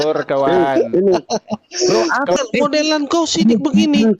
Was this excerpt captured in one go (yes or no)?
no